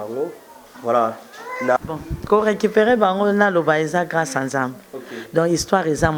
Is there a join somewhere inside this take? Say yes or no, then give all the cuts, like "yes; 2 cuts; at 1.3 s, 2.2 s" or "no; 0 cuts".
yes; 1 cut; at 1.8 s